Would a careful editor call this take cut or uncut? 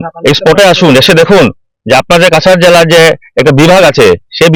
uncut